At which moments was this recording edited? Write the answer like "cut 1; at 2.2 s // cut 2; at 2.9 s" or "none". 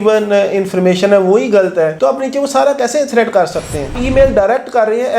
cut 1; at 3.9 s